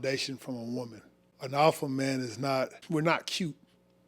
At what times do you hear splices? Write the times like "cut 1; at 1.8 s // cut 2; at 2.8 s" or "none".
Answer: cut 1; at 1.3 s // cut 2; at 2.8 s